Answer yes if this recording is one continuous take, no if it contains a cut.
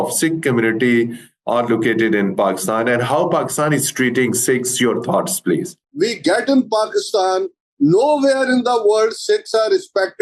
no